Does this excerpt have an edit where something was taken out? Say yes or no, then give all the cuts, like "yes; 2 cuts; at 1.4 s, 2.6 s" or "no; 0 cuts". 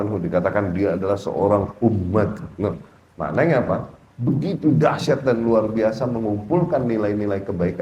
no; 0 cuts